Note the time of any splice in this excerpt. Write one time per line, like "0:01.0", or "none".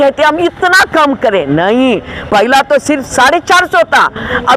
none